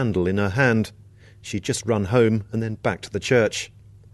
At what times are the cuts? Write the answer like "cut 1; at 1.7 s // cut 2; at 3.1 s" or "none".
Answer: cut 1; at 2.1 s